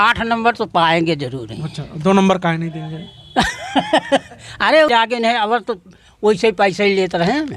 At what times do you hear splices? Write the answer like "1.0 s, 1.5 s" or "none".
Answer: 4.9 s